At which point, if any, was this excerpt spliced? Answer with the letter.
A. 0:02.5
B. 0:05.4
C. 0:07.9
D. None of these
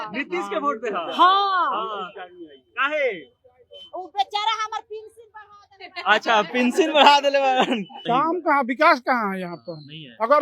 C